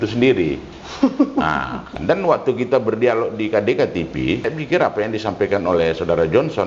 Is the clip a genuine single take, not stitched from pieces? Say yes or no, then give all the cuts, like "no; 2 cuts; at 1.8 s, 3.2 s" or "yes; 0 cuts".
no; 2 cuts; at 1.9 s, 4.5 s